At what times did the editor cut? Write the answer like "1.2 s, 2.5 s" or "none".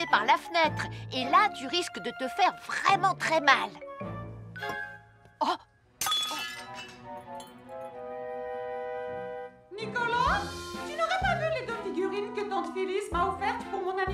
none